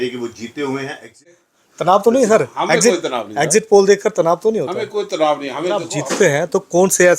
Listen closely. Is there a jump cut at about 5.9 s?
yes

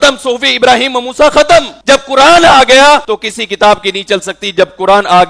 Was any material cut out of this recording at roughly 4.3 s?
no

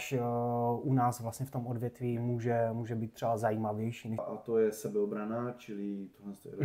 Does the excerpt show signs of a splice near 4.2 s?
yes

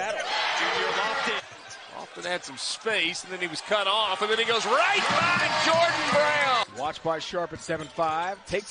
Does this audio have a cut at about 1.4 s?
yes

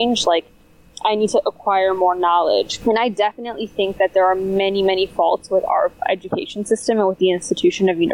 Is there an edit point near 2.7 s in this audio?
yes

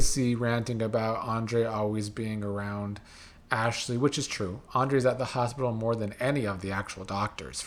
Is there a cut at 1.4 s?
no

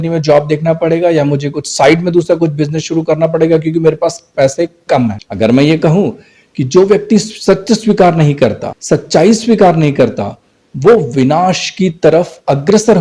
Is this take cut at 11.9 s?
no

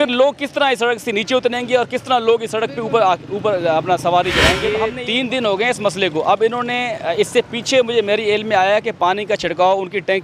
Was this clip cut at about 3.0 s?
no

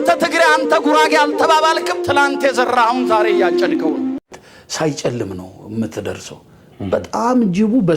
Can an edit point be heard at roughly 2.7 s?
no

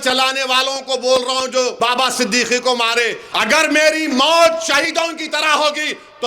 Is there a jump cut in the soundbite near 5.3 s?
no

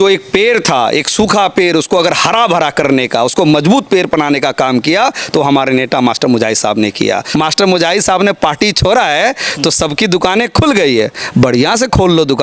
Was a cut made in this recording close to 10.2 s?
no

